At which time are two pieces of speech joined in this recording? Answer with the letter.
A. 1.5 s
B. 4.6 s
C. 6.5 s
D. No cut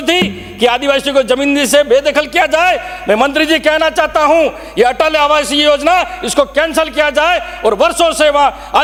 D